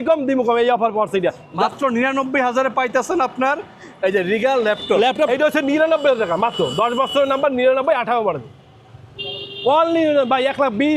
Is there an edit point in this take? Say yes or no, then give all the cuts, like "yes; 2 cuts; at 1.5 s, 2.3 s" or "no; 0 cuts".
yes; 2 cuts; at 1.4 s, 5.3 s